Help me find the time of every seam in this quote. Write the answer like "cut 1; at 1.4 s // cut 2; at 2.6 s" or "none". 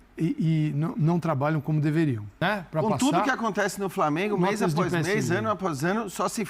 cut 1; at 2.3 s